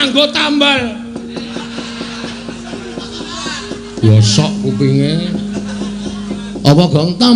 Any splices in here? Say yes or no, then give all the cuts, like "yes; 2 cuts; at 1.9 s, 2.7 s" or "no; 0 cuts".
no; 0 cuts